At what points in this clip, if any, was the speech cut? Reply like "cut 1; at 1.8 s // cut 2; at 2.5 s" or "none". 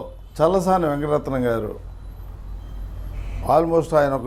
none